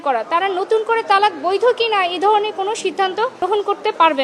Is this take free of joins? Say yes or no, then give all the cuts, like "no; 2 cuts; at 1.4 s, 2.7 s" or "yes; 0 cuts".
no; 1 cut; at 3.4 s